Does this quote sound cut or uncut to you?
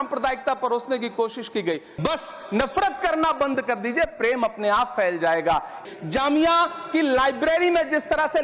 cut